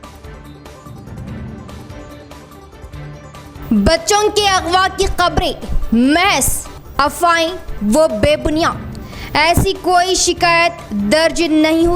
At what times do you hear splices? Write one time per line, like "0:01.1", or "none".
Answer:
none